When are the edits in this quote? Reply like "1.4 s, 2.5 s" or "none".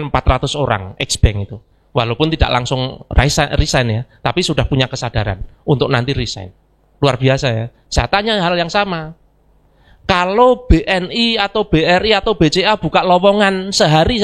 none